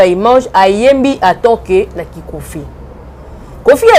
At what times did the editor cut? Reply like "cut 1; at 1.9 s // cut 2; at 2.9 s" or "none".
none